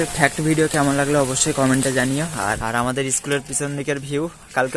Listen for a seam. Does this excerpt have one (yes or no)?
yes